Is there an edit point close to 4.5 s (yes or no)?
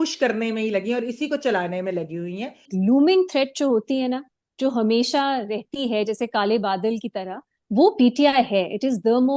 no